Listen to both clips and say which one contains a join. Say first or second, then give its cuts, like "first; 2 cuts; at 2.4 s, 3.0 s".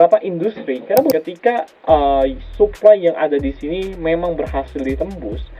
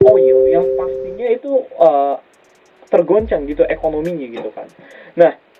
first; 1 cut; at 1.1 s